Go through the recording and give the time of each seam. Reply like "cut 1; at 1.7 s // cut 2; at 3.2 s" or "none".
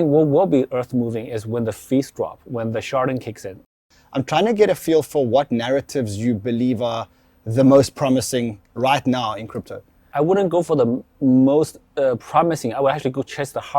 cut 1; at 3.8 s // cut 2; at 10.1 s